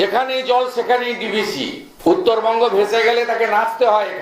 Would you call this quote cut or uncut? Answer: cut